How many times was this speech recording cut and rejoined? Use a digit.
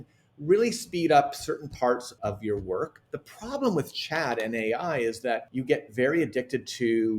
2